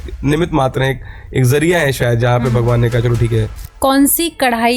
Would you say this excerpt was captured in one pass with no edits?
no; 1 cut; at 3.6 s

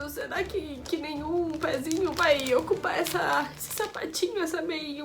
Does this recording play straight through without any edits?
yes; 0 cuts

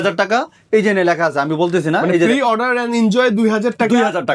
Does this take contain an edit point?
no; 0 cuts

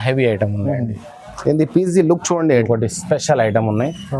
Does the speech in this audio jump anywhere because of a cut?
yes; 1 cut; at 2.6 s

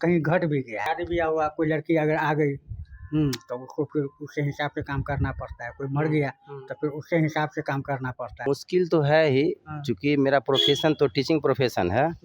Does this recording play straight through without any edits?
no; 2 cuts; at 0.8 s, 8.5 s

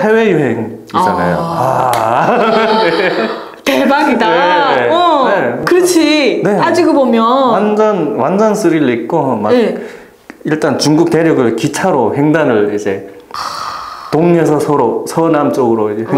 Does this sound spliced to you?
no; 0 cuts

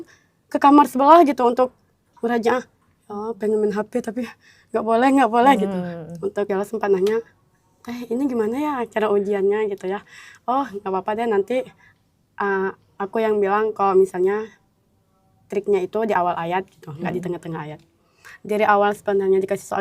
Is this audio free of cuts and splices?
no; 1 cut; at 6.5 s

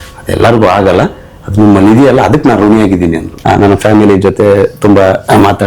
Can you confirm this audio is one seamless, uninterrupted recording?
no; 1 cut; at 3.3 s

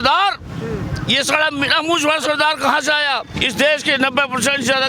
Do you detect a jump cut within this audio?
yes; 1 cut; at 3.3 s

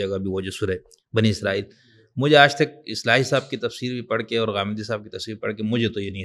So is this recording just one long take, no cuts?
yes; 0 cuts

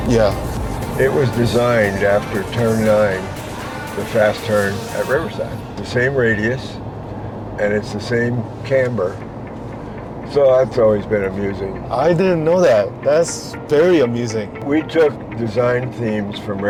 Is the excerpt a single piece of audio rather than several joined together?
yes; 0 cuts

